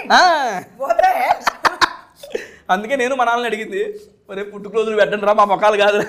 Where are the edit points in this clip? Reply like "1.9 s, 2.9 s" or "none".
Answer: none